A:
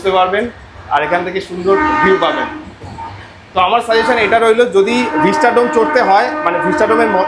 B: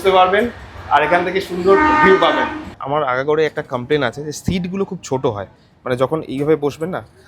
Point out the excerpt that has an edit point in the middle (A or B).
B